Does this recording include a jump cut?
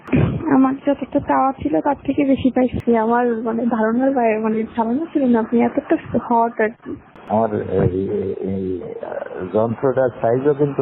yes; 2 cuts; at 2.8 s, 7.0 s

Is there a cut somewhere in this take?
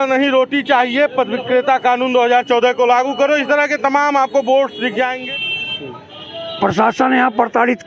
yes; 1 cut; at 5.2 s

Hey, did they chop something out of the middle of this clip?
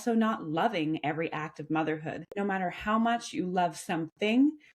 yes; 1 cut; at 2.3 s

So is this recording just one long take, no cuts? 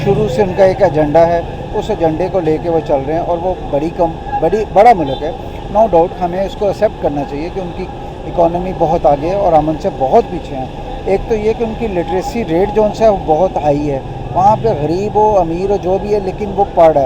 yes; 0 cuts

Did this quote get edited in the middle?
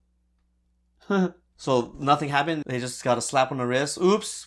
yes; 1 cut; at 2.6 s

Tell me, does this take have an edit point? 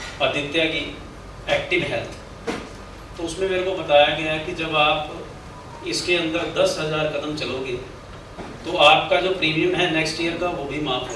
no; 0 cuts

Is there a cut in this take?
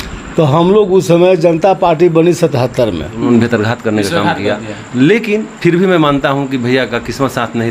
yes; 1 cut; at 3.3 s

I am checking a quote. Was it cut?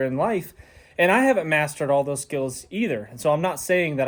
no; 0 cuts

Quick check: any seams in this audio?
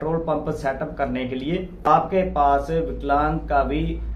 no; 0 cuts

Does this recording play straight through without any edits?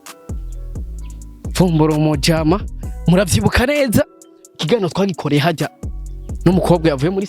no; 1 cut; at 0.9 s

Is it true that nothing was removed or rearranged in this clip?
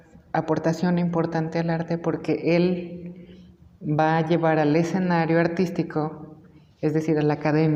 yes; 0 cuts

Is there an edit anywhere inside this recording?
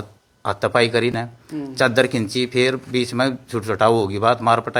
no; 0 cuts

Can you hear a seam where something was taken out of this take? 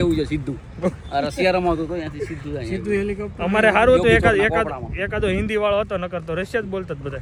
no; 0 cuts

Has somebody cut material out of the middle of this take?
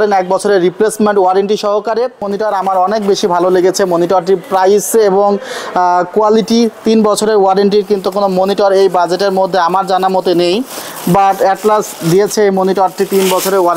yes; 1 cut; at 2.3 s

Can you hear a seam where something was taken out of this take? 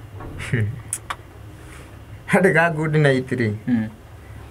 no; 0 cuts

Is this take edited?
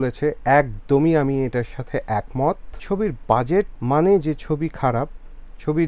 yes; 2 cuts; at 2.7 s, 3.8 s

